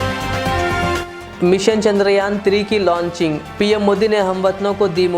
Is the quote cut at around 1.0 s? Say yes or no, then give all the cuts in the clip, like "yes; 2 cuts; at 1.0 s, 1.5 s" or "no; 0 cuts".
yes; 1 cut; at 1.0 s